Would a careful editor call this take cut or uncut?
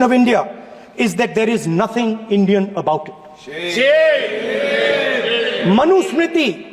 uncut